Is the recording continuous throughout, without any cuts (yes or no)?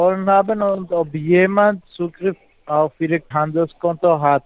no